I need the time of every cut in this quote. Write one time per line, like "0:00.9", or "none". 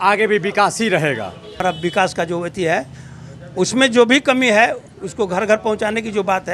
0:01.6